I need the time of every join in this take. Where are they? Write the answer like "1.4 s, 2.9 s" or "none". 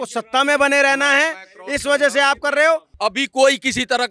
2.9 s